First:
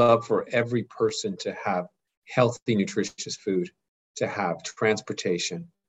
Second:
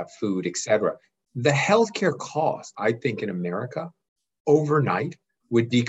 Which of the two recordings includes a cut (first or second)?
second